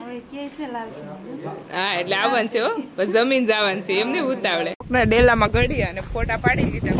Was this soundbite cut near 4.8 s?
yes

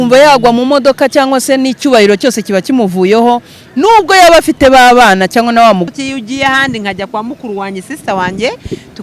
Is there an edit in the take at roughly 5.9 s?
yes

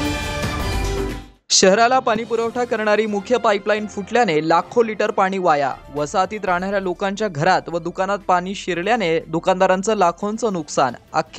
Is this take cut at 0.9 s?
yes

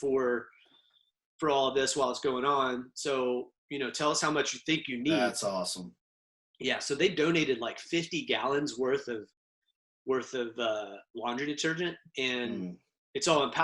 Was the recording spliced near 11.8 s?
no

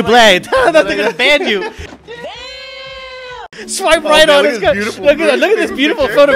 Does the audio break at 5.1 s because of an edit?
no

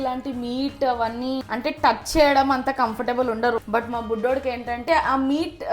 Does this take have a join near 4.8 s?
yes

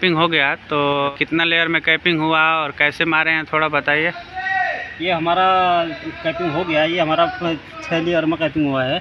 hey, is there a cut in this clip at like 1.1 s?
yes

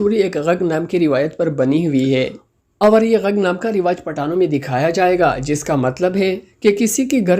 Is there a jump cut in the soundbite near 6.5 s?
yes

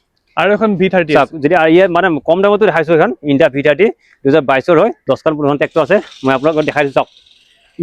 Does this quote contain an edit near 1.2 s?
no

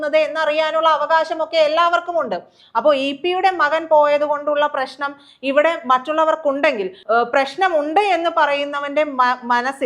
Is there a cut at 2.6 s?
no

